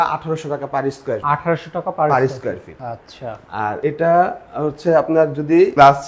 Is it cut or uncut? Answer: uncut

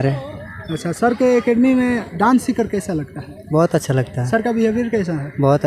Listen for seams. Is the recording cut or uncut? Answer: uncut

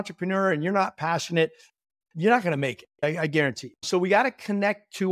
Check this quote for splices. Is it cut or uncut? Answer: cut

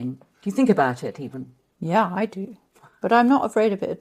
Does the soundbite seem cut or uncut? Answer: uncut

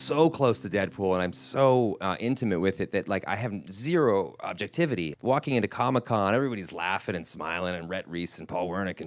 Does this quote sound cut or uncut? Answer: cut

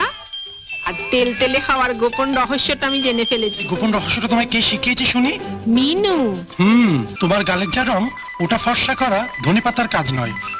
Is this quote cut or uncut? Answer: cut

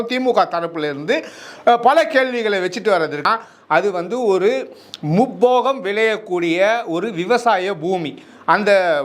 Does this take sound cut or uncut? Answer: cut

